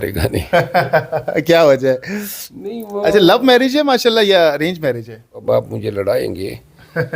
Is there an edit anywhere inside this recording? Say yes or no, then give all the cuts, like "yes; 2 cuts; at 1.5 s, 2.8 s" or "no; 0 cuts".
yes; 1 cut; at 5.4 s